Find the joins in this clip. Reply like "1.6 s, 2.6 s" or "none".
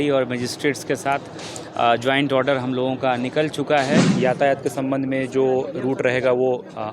4.1 s